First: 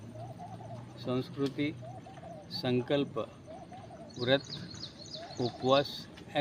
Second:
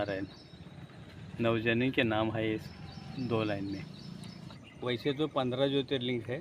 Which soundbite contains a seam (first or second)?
second